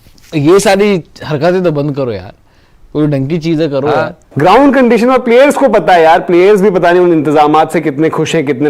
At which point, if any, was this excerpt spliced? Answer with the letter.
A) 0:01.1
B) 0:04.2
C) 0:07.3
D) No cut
B